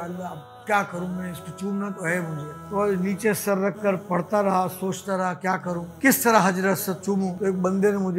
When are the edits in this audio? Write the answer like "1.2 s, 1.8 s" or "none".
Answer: 2.5 s, 5.9 s, 7.3 s